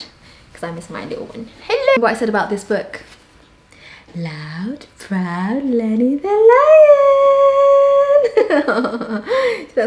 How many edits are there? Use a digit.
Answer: 1